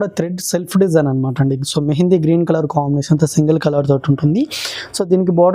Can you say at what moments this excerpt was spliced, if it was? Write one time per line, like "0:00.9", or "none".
none